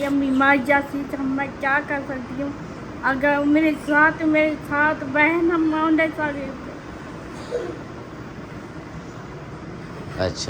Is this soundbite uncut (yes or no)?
yes